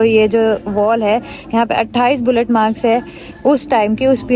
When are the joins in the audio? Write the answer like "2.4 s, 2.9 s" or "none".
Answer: none